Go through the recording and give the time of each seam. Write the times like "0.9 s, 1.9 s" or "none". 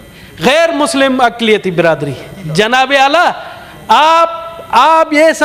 none